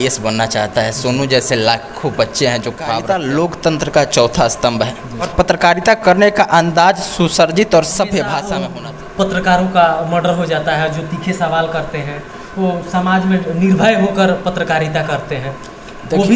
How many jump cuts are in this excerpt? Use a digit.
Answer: 2